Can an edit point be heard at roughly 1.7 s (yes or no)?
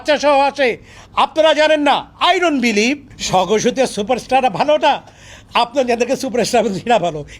no